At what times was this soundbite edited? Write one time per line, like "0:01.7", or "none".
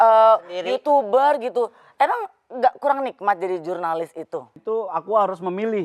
0:04.5